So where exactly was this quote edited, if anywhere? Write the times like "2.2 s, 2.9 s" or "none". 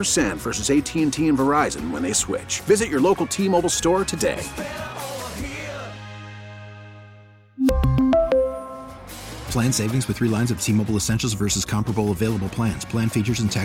none